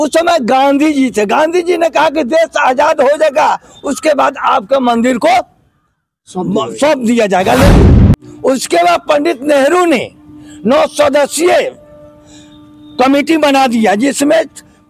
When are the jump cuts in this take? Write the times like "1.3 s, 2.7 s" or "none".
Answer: 7.9 s